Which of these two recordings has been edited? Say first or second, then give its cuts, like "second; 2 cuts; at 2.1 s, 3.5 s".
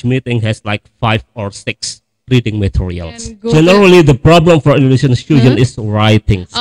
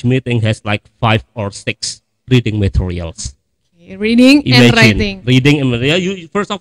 first; 1 cut; at 3.3 s